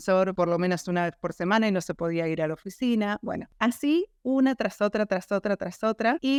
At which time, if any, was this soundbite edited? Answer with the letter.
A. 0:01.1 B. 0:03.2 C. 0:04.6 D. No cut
D